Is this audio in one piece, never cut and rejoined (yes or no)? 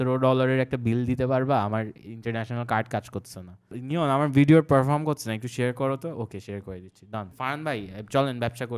no